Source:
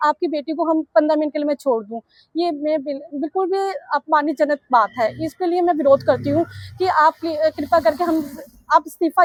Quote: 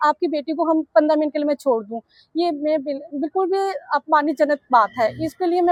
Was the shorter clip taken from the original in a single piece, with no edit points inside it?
yes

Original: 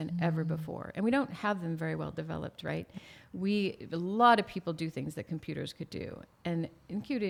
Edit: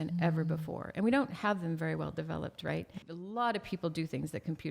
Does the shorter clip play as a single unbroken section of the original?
no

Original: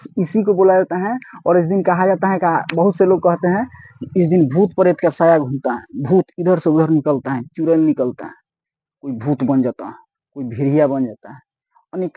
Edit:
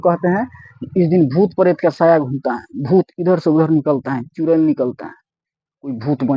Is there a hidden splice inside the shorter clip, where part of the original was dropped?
no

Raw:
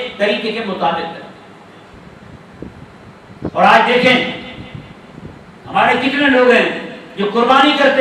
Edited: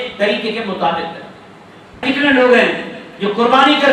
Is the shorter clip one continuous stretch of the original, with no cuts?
no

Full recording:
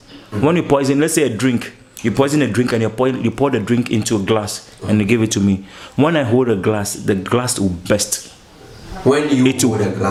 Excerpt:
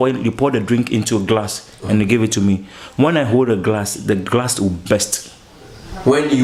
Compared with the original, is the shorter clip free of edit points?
yes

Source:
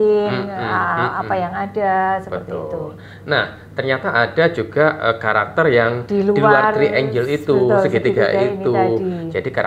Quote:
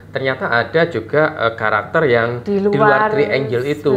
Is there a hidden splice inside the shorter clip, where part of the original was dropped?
no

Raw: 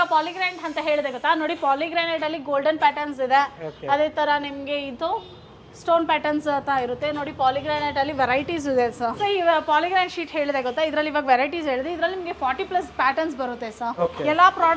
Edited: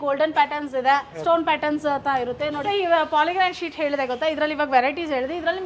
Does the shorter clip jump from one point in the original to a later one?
yes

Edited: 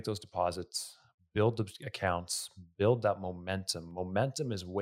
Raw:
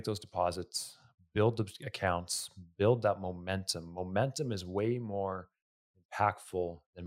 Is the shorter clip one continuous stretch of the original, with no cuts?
yes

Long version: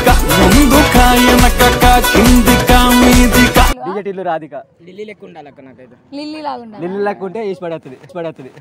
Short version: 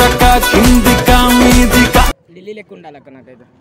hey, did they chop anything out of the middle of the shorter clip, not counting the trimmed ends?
yes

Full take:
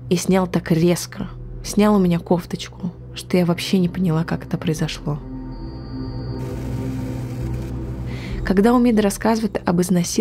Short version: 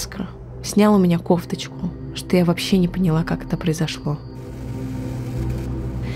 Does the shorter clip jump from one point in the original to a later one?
yes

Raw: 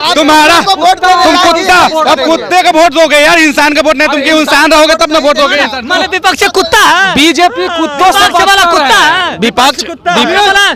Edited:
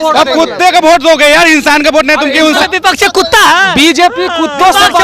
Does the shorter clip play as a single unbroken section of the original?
no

